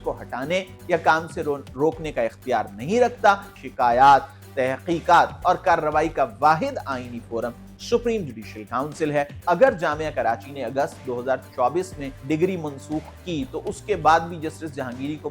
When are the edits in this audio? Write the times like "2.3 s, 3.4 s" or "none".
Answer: 3.5 s, 9.4 s, 12.1 s

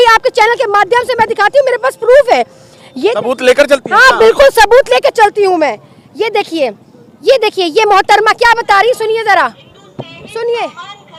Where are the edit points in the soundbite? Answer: none

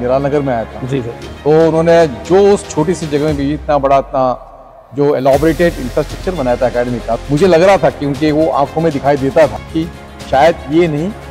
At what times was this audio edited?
7.2 s, 9.8 s

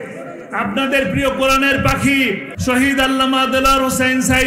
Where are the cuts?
2.5 s

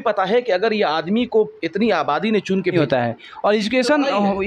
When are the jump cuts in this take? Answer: 2.7 s

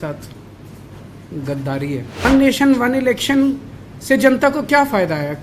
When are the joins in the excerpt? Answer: 2.2 s

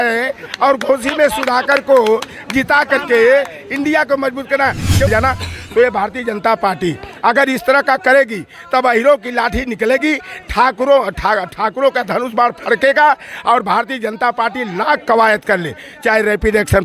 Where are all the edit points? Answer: 5.1 s

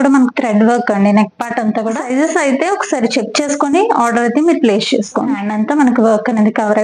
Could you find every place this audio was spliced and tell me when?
2.0 s, 5.5 s

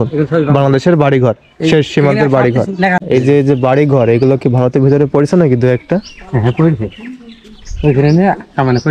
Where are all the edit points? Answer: 3.0 s

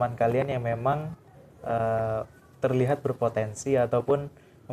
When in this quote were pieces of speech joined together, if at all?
none

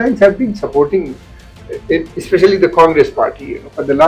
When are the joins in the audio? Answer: none

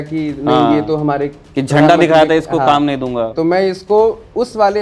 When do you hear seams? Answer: 3.3 s

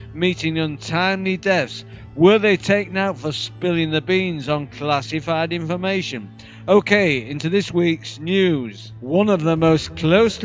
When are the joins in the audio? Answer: none

